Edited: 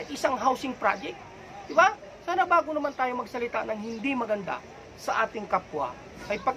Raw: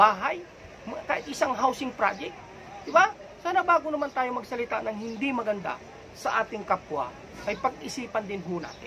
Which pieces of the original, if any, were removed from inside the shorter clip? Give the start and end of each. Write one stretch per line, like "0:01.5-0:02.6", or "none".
none